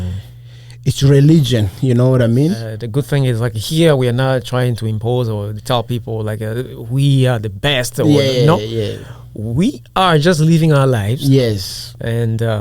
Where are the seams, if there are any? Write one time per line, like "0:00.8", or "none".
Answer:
0:02.7